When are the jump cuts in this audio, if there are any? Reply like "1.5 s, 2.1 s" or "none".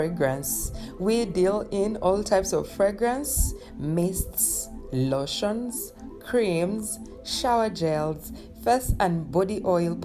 none